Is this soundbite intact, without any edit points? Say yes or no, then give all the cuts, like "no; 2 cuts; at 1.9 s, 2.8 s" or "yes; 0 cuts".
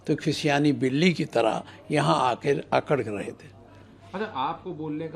yes; 0 cuts